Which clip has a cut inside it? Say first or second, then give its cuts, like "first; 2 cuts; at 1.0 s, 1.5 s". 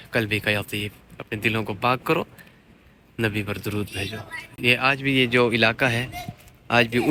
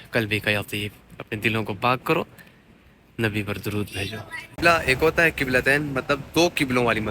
second; 1 cut; at 4.6 s